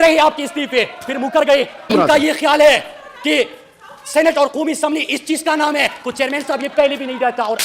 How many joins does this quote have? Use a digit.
1